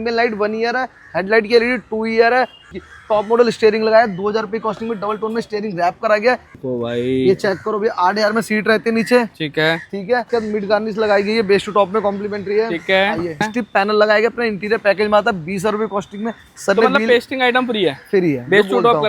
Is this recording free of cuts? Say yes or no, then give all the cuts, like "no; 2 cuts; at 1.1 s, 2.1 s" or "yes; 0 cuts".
no; 5 cuts; at 2.6 s, 6.5 s, 10.3 s, 13.5 s, 16.5 s